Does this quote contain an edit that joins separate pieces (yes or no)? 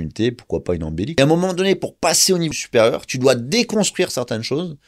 yes